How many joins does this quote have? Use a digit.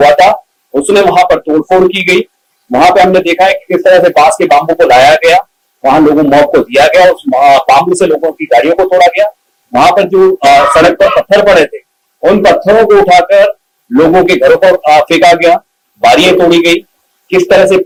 0